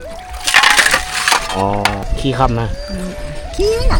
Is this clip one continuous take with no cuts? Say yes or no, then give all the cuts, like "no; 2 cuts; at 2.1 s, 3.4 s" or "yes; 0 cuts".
no; 1 cut; at 2.1 s